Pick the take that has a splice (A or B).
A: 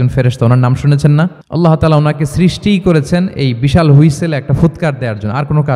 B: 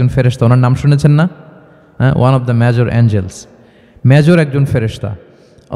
A